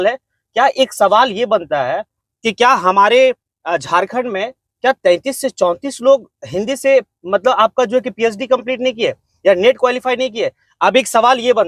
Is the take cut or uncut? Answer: uncut